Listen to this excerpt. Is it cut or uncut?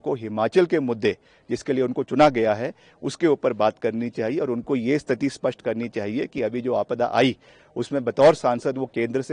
uncut